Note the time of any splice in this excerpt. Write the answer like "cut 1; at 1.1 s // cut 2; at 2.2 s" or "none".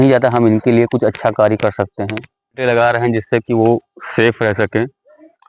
cut 1; at 2.6 s